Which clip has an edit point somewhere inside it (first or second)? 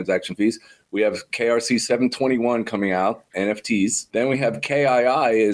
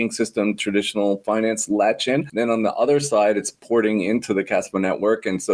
first